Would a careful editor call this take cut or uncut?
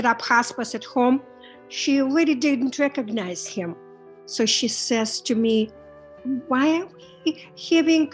uncut